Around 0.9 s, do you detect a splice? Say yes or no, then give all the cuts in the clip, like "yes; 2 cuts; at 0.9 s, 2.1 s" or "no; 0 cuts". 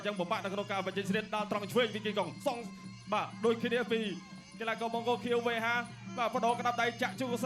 no; 0 cuts